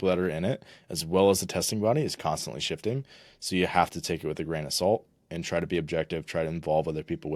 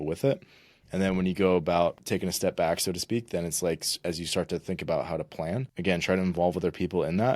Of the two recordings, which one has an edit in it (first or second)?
second